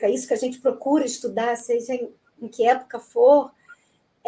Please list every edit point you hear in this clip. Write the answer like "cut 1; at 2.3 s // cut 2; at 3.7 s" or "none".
none